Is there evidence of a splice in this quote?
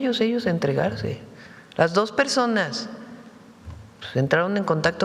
no; 0 cuts

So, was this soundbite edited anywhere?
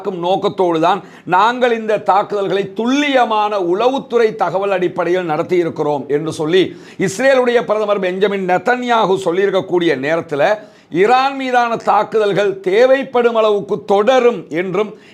no; 0 cuts

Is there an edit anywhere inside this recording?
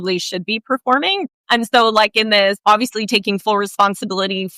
yes; 2 cuts; at 1.2 s, 2.6 s

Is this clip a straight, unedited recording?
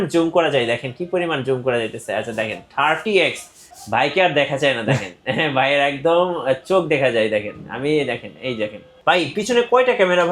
no; 1 cut; at 8.9 s

